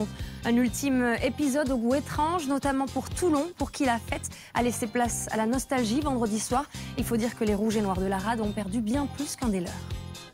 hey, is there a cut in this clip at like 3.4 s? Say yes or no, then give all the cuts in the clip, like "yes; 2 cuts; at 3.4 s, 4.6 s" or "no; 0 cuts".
no; 0 cuts